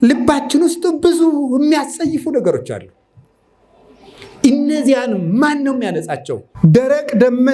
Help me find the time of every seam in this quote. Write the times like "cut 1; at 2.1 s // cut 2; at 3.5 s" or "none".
cut 1; at 6.5 s